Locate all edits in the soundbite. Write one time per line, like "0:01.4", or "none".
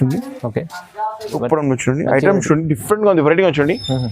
0:01.3